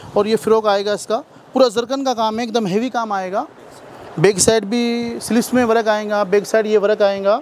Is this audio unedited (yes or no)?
yes